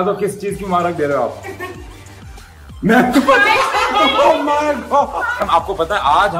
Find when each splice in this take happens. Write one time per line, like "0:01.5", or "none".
0:05.4